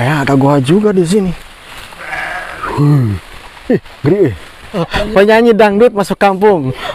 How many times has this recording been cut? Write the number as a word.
one